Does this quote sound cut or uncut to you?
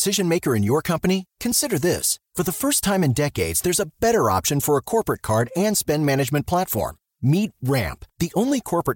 uncut